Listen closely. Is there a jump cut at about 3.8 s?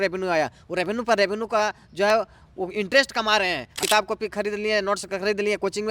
yes; 1 cut; at 3.8 s

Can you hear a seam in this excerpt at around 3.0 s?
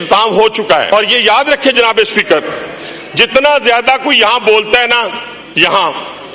no; 1 cut; at 0.9 s

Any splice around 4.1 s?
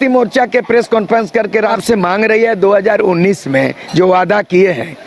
no; 1 cut; at 1.8 s

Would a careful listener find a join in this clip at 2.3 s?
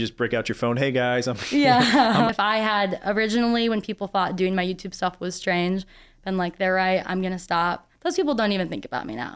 yes; 1 cut; at 2.3 s

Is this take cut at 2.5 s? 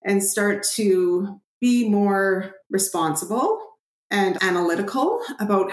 yes; 2 cuts; at 2.5 s, 4.4 s

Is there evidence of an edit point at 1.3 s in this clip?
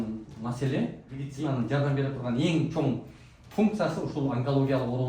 yes; 1 cut; at 1.3 s

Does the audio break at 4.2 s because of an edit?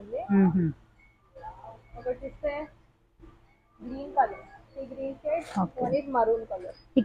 no; 0 cuts

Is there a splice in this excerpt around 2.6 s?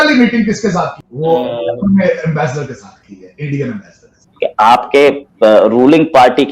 no; 2 cuts; at 1.0 s, 4.3 s

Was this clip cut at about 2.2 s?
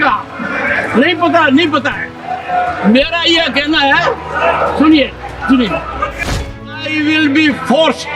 no; 1 cut; at 6.6 s

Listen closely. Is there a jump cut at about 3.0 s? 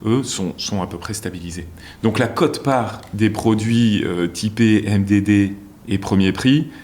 yes; 1 cut; at 3.0 s

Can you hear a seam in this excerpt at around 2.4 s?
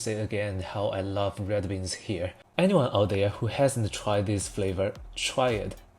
yes; 1 cut; at 2.4 s

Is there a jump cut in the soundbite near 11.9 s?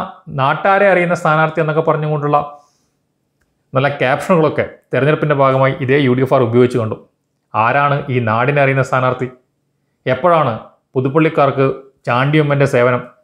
no; 0 cuts

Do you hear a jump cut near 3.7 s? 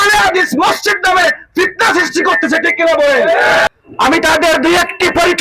yes; 1 cut; at 3.7 s

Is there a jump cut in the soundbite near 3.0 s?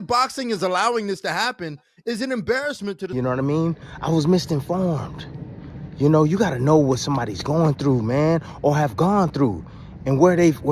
yes; 1 cut; at 3.0 s

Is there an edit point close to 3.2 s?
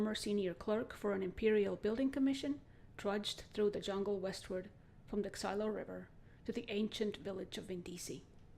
no; 1 cut; at 7.4 s

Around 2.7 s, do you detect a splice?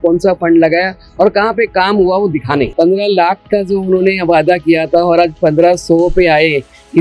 yes; 1 cut; at 2.7 s

